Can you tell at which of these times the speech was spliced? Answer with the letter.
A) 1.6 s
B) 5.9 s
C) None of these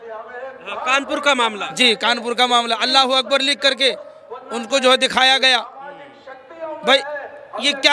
C